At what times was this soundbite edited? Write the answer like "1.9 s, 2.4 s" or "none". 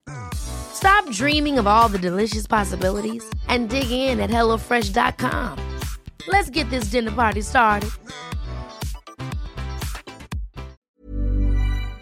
10.8 s

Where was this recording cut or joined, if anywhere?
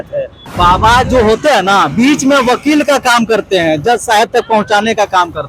none

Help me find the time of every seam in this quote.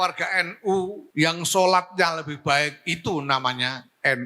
1.0 s

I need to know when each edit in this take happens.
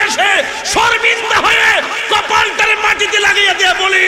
none

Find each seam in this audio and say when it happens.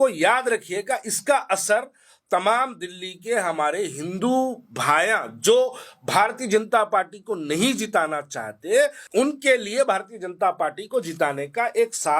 9.0 s

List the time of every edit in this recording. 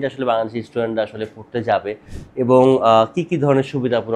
none

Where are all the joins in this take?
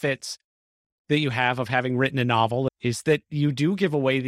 2.7 s

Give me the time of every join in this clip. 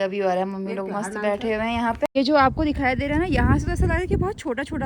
2.0 s

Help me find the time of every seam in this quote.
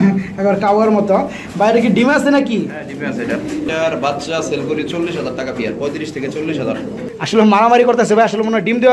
3.7 s, 7.0 s

